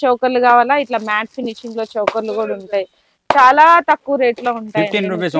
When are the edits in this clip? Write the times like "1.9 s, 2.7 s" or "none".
none

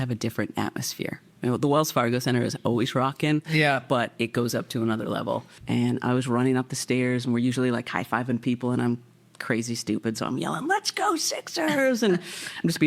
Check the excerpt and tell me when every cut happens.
5.5 s

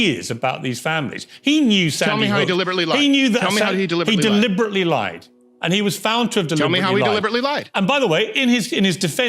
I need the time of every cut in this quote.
8.1 s

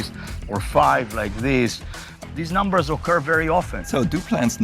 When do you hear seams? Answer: 2.1 s, 3.8 s

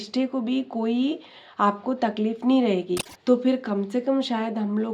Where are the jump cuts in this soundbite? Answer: 3.1 s

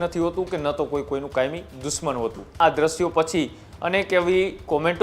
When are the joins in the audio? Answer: 2.6 s

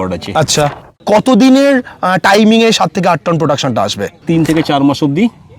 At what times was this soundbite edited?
0.9 s, 4.2 s

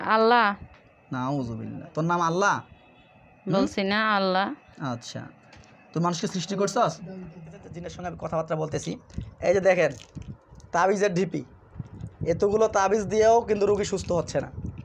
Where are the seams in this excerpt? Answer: 7.8 s

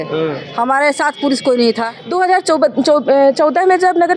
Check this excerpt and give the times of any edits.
1.9 s

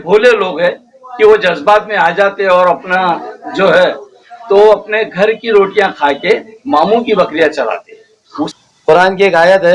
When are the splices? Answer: 8.5 s

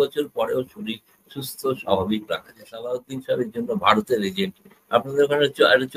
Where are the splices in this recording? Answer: 2.7 s

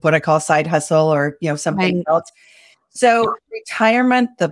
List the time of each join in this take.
3.6 s

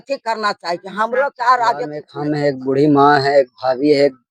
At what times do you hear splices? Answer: 2.1 s

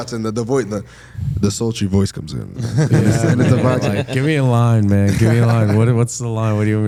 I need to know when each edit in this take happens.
none

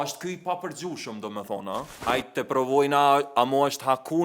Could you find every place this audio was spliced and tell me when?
2.0 s

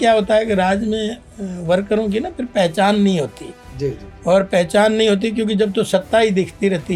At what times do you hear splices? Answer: none

